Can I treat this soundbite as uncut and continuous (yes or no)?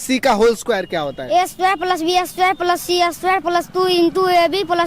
yes